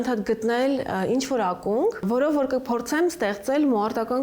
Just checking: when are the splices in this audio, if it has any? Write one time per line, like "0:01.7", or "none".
0:02.0